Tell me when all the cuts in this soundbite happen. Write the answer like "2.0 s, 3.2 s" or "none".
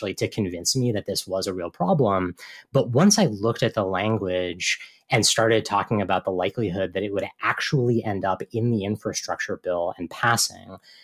none